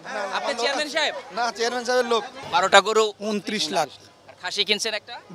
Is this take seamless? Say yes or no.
no